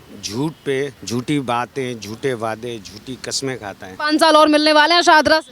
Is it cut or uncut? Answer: cut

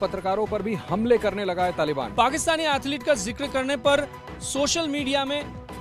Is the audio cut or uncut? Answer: cut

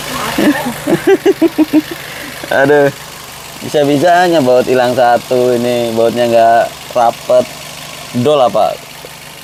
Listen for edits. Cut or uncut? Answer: uncut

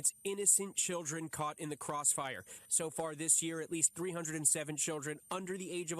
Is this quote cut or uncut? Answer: cut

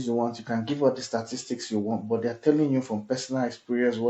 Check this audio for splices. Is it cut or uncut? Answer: uncut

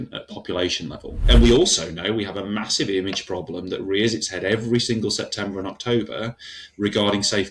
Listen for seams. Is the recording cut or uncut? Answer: cut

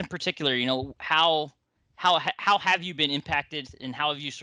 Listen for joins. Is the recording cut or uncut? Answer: uncut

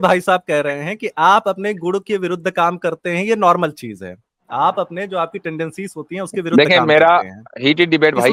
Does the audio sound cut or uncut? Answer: uncut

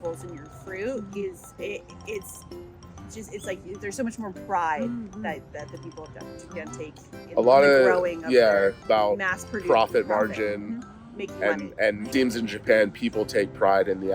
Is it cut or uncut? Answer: cut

